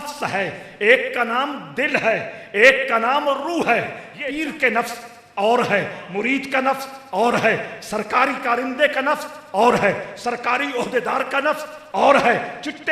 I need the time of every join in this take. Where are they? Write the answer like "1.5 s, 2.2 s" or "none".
4.0 s